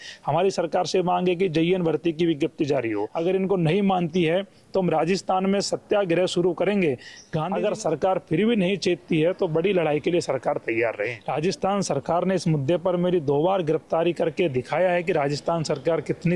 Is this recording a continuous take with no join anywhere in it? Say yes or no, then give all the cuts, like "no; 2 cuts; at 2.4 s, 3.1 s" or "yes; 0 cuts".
no; 3 cuts; at 3.1 s, 7.1 s, 11.2 s